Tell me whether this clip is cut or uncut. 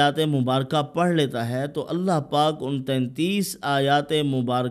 uncut